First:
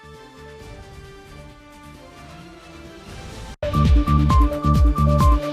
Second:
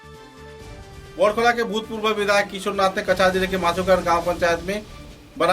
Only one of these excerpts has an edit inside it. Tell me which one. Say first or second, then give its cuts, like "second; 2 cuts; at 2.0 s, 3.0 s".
second; 1 cut; at 0.9 s